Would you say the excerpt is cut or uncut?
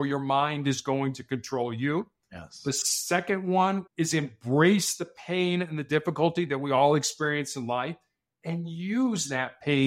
cut